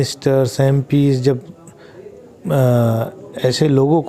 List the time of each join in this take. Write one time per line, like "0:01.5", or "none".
none